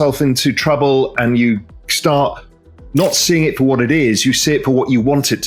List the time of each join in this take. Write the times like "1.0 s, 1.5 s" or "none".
none